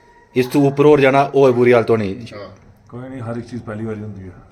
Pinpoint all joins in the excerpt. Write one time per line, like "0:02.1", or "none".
none